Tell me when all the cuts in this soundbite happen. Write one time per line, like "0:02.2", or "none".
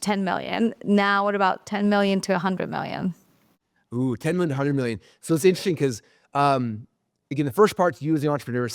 none